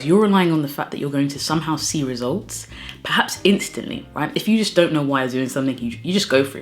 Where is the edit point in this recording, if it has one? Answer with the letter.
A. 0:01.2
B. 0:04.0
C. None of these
C